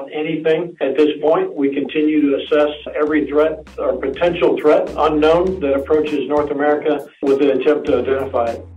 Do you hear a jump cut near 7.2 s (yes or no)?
yes